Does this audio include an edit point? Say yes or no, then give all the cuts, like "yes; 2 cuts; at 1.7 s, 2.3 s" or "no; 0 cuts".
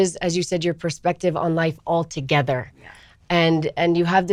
no; 0 cuts